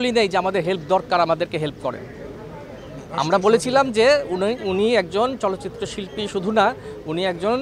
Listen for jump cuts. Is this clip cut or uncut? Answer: uncut